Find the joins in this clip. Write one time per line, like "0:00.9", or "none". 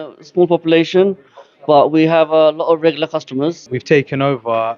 0:03.7